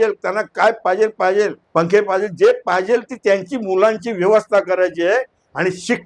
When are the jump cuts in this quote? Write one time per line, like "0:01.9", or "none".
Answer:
0:01.6